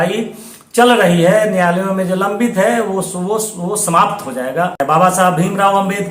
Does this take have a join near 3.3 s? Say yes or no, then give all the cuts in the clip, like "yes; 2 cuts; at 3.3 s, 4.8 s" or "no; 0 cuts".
no; 1 cut; at 4.8 s